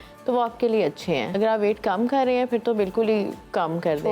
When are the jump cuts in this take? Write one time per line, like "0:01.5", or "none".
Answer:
0:01.3